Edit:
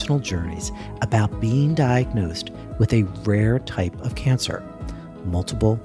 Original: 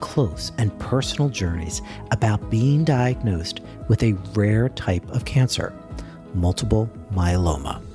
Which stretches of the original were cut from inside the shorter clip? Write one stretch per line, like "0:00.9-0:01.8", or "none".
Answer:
none